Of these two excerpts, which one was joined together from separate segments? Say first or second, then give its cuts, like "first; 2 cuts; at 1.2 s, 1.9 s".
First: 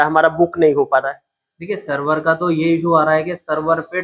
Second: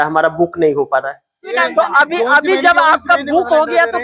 second; 1 cut; at 1.4 s